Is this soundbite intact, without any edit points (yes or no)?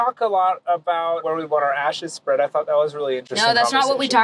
no